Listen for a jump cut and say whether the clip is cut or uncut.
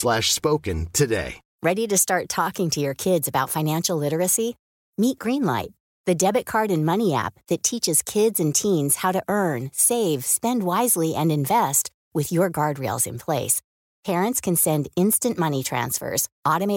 cut